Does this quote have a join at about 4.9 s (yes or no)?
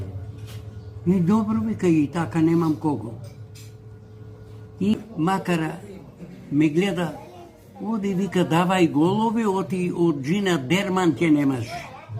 yes